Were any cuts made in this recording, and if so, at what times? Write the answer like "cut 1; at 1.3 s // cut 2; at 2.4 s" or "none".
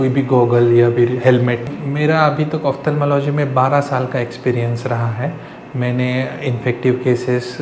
cut 1; at 1.8 s